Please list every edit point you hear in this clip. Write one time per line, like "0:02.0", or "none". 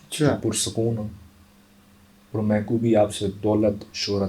none